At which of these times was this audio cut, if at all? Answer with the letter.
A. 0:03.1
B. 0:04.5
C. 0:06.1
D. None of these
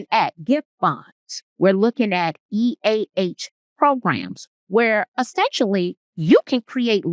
C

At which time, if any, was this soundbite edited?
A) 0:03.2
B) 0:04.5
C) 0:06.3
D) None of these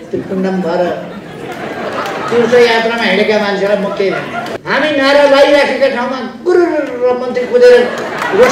B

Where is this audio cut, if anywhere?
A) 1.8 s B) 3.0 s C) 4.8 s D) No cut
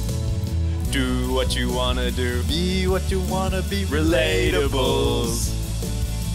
D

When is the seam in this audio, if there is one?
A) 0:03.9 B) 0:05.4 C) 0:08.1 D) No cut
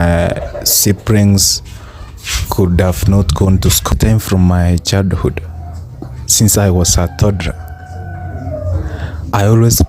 A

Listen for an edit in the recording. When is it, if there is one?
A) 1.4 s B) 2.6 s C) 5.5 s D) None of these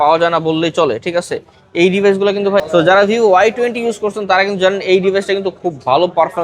B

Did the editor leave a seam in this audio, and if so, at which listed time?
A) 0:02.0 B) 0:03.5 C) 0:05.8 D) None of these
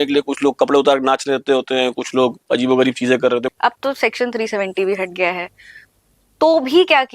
B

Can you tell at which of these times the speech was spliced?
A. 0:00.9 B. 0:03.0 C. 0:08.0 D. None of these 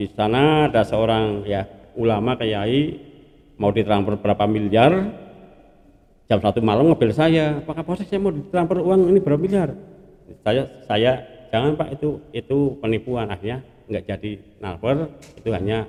D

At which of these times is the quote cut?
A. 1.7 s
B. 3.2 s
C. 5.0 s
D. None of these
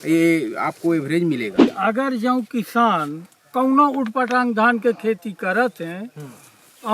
A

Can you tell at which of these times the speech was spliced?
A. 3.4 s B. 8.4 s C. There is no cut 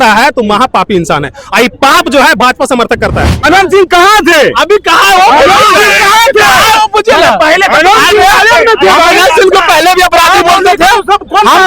A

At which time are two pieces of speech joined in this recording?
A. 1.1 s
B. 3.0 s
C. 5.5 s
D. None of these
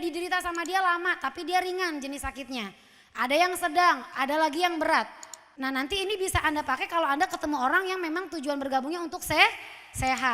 C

